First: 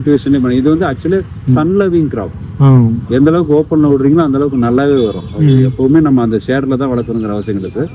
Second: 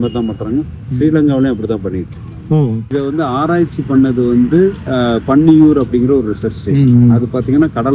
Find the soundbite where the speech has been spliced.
second; 1 cut; at 2.9 s

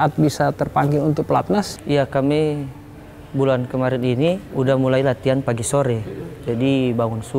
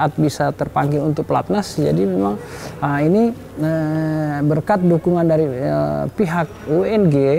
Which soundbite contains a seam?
first; 1 cut; at 1.7 s

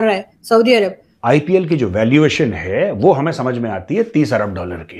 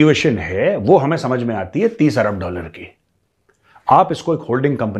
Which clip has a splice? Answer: first; 1 cut; at 1.1 s

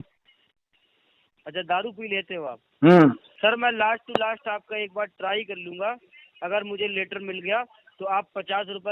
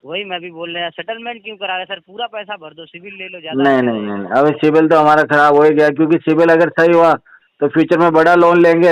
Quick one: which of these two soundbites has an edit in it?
first; 1 cut; at 3.3 s

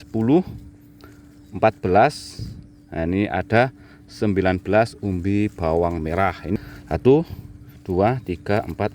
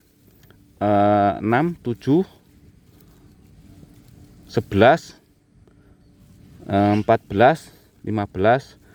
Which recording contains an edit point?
first; 1 cut; at 6.6 s

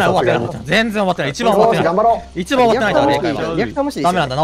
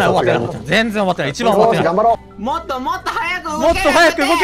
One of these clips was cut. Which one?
second; 1 cut; at 2.3 s

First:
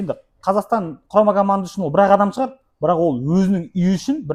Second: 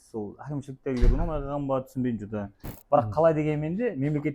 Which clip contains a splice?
second; 1 cut; at 2.7 s

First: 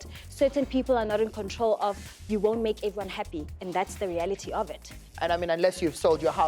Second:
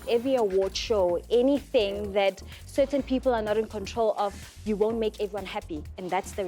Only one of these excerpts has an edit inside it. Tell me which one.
first; 1 cut; at 5.0 s

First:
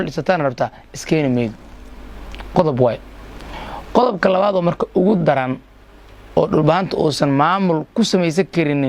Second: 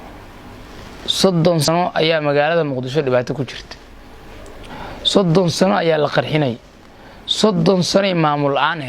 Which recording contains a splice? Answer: second; 1 cut; at 1.7 s

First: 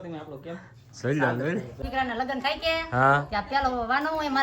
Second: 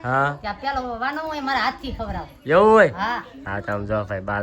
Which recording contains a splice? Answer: first; 1 cut; at 1.8 s

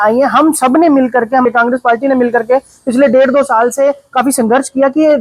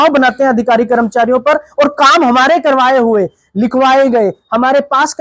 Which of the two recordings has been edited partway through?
first; 1 cut; at 1.4 s

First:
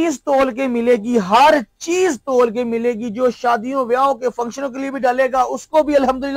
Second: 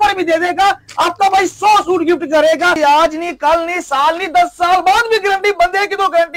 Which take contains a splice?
second; 1 cut; at 2.8 s

